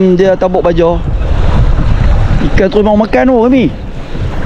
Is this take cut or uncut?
uncut